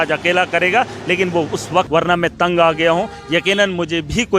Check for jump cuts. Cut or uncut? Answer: cut